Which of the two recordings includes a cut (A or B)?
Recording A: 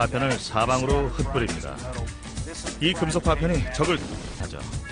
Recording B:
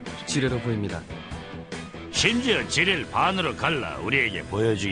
B